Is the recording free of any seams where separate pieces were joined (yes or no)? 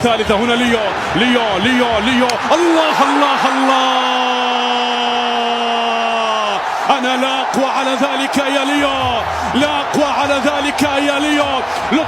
yes